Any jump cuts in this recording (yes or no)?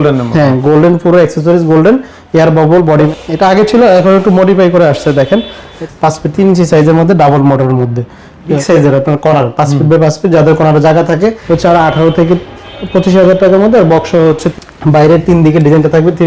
yes